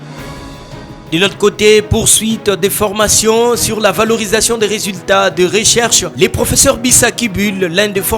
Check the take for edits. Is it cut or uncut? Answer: cut